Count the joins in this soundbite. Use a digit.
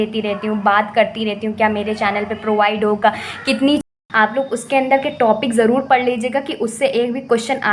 1